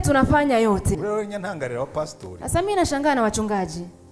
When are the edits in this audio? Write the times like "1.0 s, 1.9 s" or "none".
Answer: 0.9 s, 2.6 s